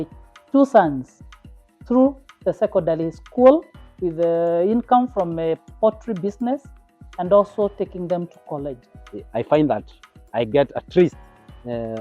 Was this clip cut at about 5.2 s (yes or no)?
no